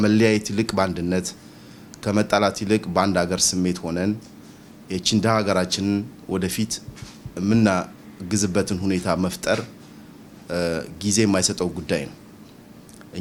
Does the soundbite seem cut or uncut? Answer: uncut